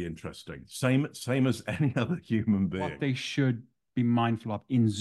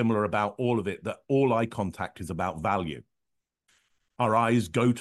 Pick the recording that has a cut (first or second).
first